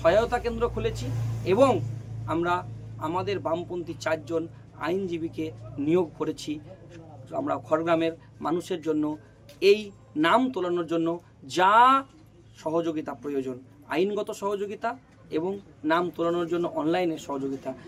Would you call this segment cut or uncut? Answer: uncut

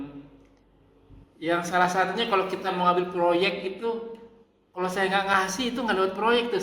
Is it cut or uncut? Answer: uncut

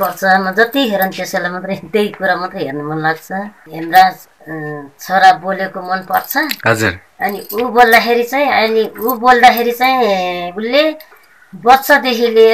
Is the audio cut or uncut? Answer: cut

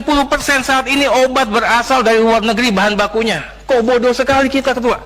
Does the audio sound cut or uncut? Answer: uncut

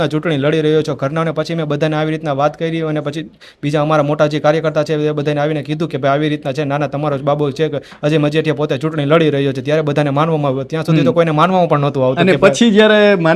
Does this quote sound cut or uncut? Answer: uncut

